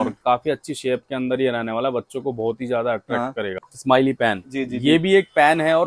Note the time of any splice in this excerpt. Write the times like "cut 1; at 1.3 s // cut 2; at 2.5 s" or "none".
cut 1; at 3.7 s